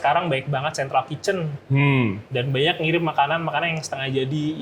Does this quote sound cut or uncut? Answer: uncut